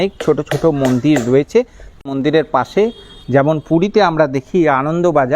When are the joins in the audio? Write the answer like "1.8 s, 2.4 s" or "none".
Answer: 1.8 s